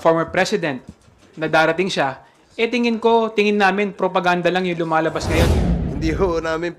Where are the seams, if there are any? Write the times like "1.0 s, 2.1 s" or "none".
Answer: 5.5 s

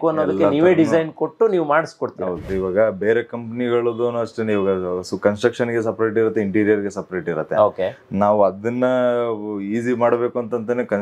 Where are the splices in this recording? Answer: 2.5 s

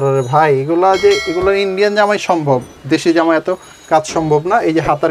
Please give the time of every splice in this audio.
none

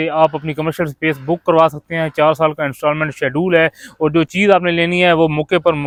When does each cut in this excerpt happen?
none

